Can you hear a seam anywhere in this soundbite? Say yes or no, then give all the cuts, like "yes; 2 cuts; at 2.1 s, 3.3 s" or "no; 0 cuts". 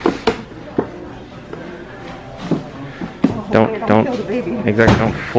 no; 0 cuts